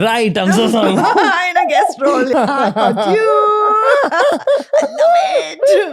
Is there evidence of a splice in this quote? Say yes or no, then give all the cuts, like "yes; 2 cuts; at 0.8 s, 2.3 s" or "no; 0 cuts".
yes; 1 cut; at 2.3 s